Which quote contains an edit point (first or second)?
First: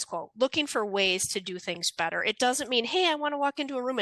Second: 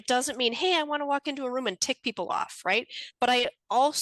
second